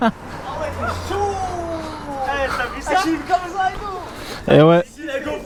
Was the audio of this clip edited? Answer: no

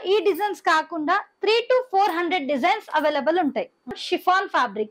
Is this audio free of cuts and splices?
no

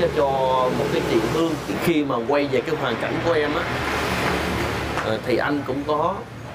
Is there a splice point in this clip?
yes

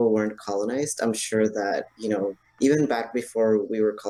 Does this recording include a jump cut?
no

